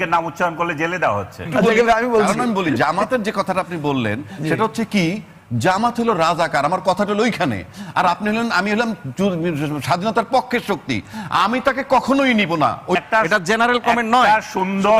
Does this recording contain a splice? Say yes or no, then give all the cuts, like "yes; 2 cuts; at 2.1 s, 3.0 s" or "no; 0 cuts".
yes; 2 cuts; at 1.4 s, 13.0 s